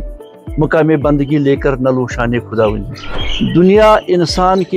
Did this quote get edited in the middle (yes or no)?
yes